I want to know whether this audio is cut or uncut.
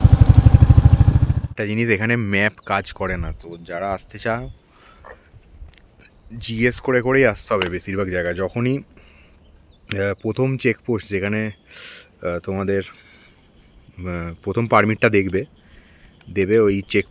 cut